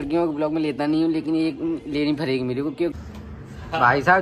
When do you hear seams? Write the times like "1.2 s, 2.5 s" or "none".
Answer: 2.9 s